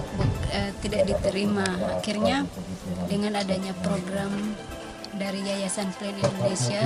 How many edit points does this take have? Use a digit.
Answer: 0